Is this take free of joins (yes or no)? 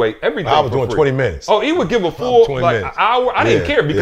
yes